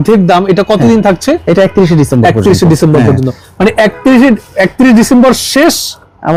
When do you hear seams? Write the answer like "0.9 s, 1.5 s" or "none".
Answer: none